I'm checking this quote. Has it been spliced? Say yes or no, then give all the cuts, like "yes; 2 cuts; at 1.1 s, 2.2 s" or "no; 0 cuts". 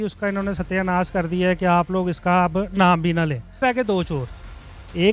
yes; 1 cut; at 3.6 s